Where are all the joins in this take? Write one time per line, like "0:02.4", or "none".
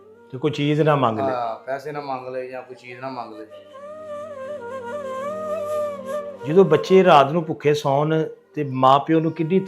0:06.4